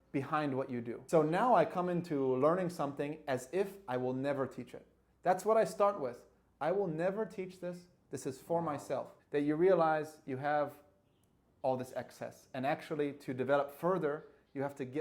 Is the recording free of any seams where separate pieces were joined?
no; 2 cuts; at 0.9 s, 9.2 s

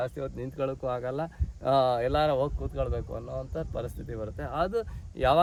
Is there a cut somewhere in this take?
no; 0 cuts

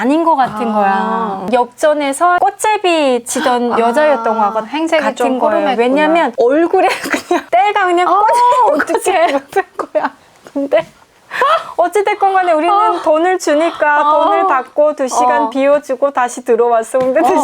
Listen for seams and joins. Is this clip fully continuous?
no; 2 cuts; at 1.5 s, 7.4 s

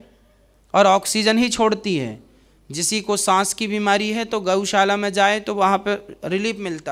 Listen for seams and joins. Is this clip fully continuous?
yes; 0 cuts

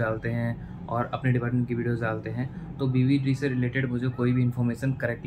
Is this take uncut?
yes; 0 cuts

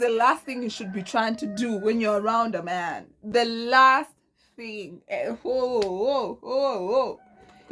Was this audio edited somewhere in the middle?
no; 0 cuts

